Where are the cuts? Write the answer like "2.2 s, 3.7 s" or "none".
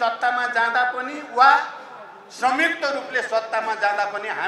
none